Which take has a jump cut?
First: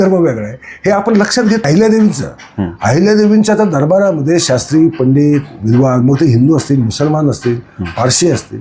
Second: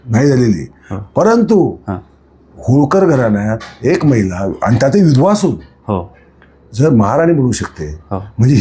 first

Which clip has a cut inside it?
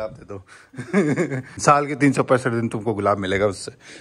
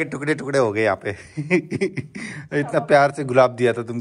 first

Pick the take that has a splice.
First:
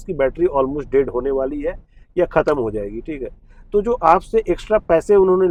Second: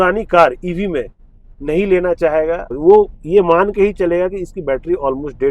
second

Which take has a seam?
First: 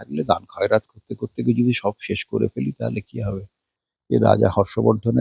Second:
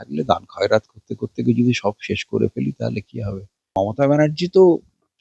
second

